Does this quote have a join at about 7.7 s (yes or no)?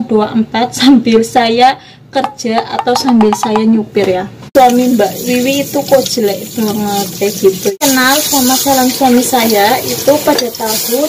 yes